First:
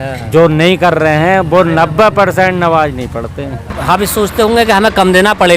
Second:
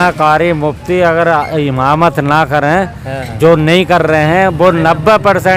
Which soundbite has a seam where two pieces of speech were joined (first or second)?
first